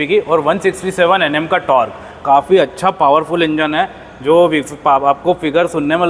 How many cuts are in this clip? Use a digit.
0